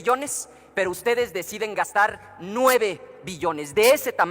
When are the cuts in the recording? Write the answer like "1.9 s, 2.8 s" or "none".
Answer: none

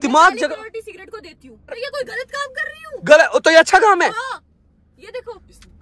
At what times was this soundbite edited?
1.8 s

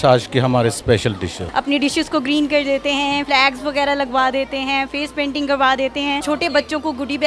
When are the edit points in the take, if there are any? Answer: 1.4 s, 3.2 s, 6.2 s

